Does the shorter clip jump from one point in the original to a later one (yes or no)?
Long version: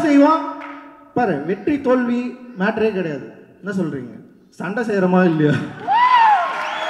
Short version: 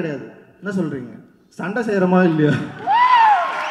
no